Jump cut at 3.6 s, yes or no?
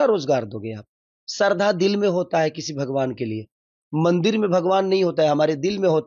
no